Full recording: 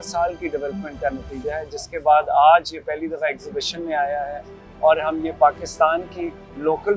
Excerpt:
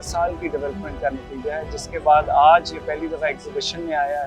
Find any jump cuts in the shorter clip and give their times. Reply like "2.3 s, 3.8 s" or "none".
none